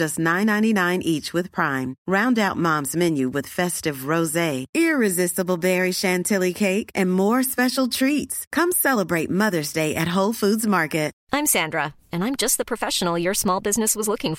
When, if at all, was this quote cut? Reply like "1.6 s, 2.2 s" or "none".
11.1 s